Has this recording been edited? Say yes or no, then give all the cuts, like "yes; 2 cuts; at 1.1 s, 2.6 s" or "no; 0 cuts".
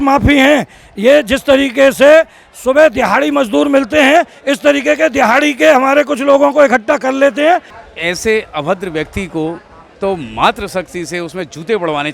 yes; 1 cut; at 7.7 s